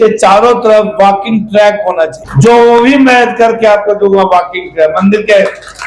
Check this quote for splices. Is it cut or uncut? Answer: cut